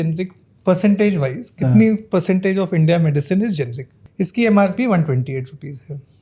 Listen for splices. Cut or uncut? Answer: cut